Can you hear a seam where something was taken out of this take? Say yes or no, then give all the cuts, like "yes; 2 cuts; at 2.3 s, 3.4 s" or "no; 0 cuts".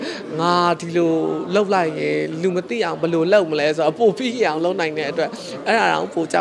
no; 0 cuts